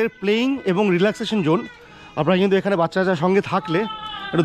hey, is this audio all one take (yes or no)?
yes